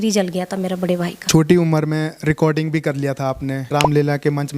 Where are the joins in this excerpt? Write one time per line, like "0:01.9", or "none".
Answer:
0:01.2
0:03.6